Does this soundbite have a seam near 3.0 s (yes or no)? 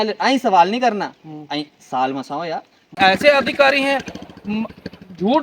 yes